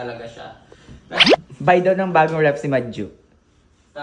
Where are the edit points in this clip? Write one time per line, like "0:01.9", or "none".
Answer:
0:01.3